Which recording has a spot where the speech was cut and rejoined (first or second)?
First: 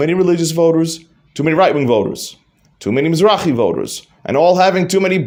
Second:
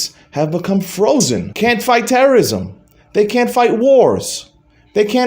second